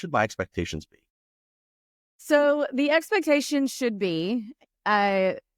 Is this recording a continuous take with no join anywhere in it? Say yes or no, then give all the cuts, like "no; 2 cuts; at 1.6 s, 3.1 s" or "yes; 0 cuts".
yes; 0 cuts